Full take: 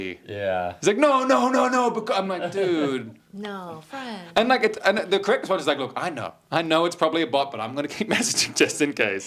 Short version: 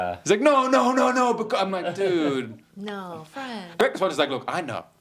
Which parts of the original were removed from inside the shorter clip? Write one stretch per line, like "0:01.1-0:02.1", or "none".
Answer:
0:04.3-0:05.2

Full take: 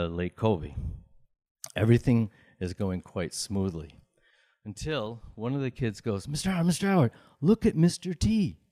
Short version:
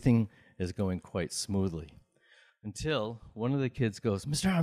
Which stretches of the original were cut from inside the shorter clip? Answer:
none

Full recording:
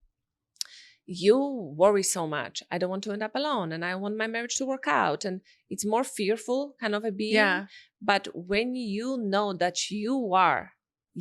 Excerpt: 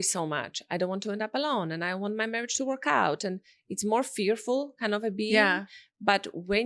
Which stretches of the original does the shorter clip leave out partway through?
none

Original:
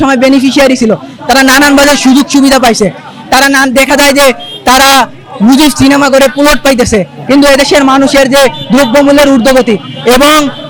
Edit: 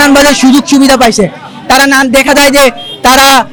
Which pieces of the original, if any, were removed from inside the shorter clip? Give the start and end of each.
none

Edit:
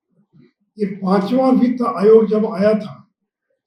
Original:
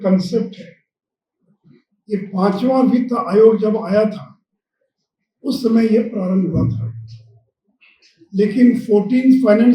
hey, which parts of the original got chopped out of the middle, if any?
none

